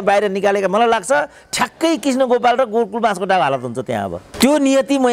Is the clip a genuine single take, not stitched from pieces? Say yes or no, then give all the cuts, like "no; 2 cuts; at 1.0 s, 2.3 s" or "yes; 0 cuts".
no; 1 cut; at 4.2 s